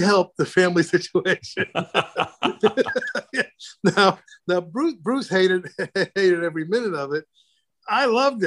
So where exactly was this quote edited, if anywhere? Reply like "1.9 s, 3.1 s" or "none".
4.3 s